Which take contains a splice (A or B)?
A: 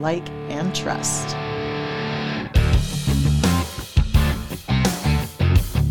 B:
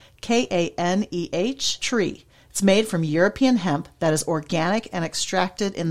A